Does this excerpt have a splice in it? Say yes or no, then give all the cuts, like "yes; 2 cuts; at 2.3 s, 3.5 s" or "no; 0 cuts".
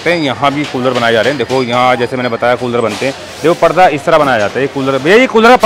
no; 0 cuts